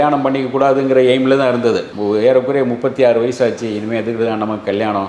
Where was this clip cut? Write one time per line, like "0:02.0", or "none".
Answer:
none